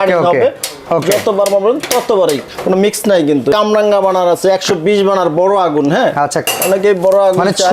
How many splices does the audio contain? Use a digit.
1